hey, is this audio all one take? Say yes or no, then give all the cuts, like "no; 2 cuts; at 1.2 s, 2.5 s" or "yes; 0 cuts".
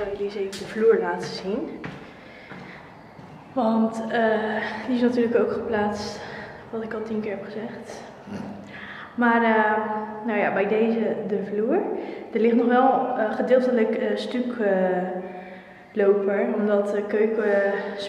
yes; 0 cuts